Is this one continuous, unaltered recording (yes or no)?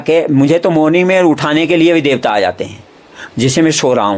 yes